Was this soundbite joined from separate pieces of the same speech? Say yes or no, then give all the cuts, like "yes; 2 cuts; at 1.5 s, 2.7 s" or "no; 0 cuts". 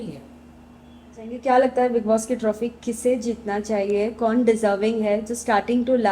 yes; 1 cut; at 1.3 s